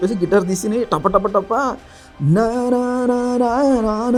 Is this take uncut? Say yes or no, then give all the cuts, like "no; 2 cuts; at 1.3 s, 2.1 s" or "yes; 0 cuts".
yes; 0 cuts